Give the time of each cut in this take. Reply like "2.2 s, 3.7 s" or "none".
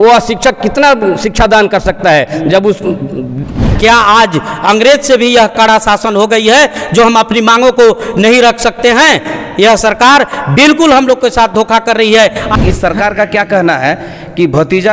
3.7 s, 12.5 s